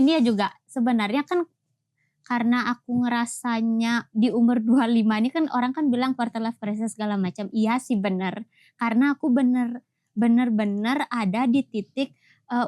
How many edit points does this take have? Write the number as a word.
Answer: zero